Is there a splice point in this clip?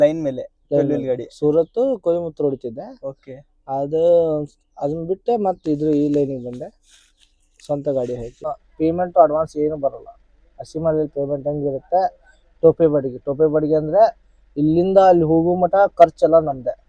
yes; 1 cut; at 8.5 s

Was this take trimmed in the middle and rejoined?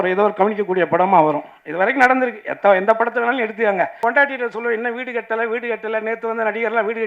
yes; 1 cut; at 4.0 s

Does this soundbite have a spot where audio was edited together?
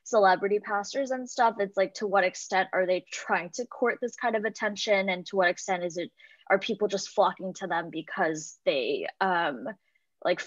no; 0 cuts

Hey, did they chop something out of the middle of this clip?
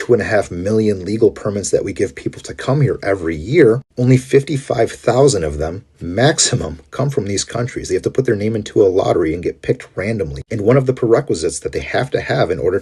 no; 0 cuts

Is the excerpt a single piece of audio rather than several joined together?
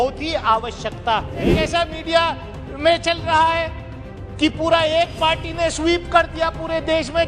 no; 1 cut; at 1.5 s

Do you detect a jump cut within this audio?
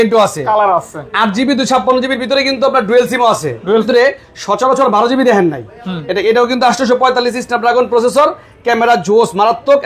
yes; 1 cut; at 3.9 s

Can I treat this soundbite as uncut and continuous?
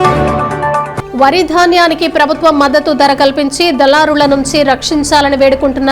no; 1 cut; at 0.9 s

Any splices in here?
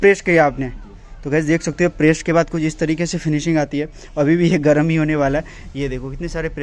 no; 0 cuts

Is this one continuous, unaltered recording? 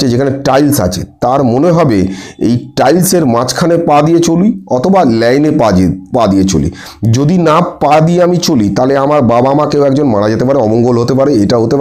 yes; 0 cuts

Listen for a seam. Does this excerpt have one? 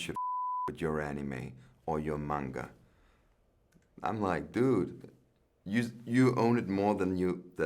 no; 0 cuts

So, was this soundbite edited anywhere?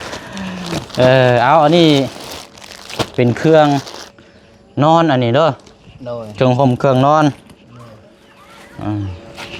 no; 0 cuts

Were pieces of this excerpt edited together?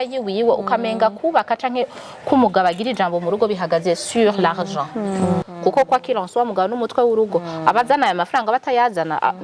yes; 1 cut; at 5.5 s

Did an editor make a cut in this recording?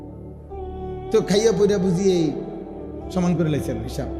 yes; 1 cut; at 1.0 s

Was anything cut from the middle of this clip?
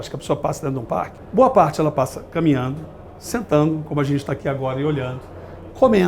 yes; 1 cut; at 1.2 s

